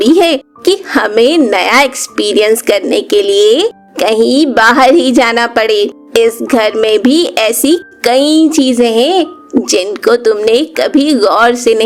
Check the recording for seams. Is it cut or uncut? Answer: uncut